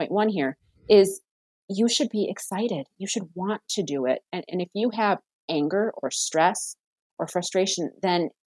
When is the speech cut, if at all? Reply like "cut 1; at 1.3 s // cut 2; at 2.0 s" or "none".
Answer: none